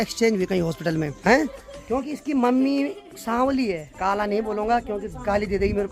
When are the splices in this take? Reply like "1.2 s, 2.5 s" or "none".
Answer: none